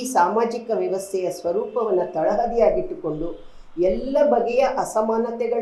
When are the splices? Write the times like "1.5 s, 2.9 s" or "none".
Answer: none